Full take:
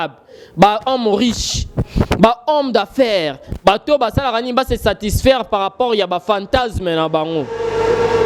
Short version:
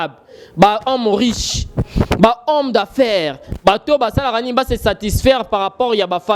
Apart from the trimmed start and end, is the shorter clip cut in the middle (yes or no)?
no